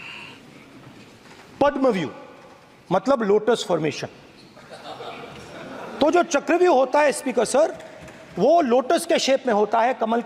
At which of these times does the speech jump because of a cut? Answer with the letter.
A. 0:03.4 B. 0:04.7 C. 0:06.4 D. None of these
D